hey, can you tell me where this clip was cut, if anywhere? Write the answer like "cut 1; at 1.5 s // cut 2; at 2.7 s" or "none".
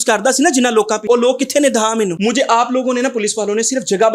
cut 1; at 1.0 s // cut 2; at 2.1 s